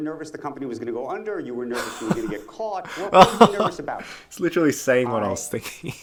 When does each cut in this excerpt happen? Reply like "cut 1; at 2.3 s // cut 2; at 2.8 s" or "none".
none